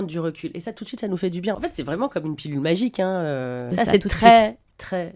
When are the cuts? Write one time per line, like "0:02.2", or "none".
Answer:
0:01.6
0:03.6